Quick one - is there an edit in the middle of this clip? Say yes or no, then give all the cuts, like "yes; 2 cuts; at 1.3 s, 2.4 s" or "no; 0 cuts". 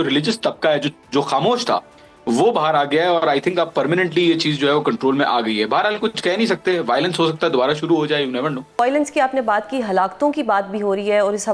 yes; 1 cut; at 8.7 s